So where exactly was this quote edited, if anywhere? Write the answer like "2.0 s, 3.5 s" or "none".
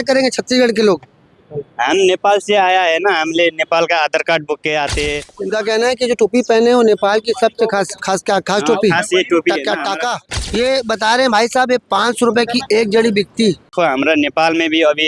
5.3 s, 10.3 s, 13.7 s